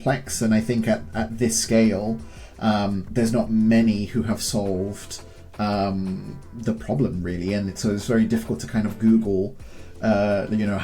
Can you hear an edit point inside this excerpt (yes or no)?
no